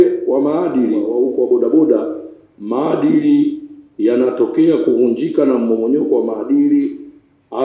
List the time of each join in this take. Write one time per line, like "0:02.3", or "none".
0:01.1